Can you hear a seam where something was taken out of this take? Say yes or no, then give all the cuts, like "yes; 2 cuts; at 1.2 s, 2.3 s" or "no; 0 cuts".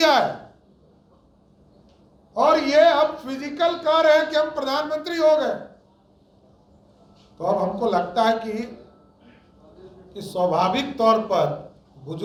no; 0 cuts